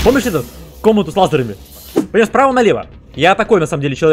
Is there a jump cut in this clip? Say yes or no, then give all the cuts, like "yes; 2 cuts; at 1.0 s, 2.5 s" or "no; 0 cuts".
yes; 1 cut; at 1.9 s